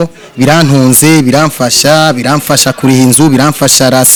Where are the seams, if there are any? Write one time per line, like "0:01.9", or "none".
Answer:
none